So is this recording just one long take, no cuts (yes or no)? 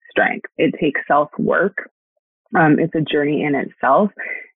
yes